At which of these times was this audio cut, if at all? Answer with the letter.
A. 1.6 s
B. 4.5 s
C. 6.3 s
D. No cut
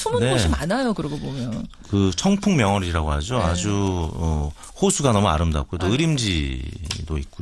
B